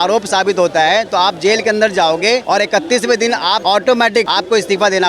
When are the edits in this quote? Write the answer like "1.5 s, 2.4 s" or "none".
2.4 s, 3.6 s, 4.3 s